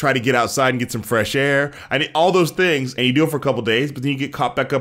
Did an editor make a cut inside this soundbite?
yes; 1 cut; at 3.2 s

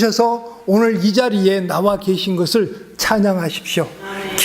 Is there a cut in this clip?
no; 0 cuts

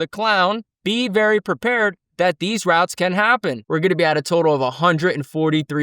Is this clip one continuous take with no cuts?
no; 1 cut; at 3.6 s

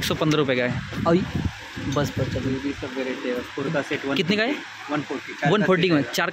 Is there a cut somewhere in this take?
no; 0 cuts

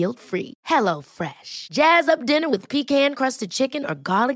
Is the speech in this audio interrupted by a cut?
no; 0 cuts

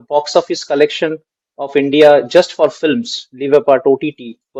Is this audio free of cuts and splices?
yes; 0 cuts

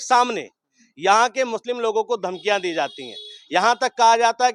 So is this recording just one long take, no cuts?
yes; 0 cuts

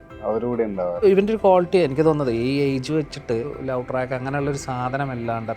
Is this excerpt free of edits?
no; 2 cuts; at 1.0 s, 3.6 s

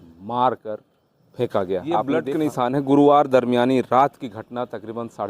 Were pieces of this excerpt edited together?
yes; 1 cut; at 2.1 s

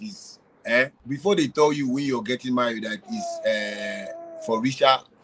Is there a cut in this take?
yes; 1 cut; at 1.0 s

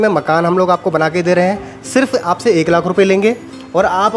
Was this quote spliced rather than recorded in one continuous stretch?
no; 0 cuts

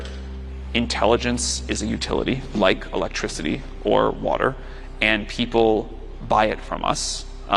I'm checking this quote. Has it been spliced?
no; 0 cuts

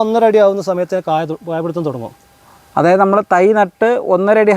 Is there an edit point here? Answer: no; 0 cuts

